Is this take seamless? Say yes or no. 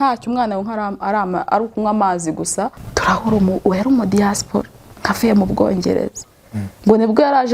no